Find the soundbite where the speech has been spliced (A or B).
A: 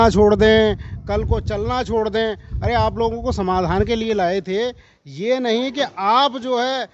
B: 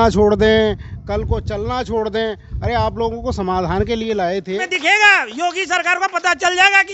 B